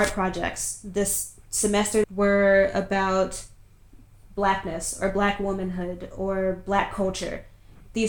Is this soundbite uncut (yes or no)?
no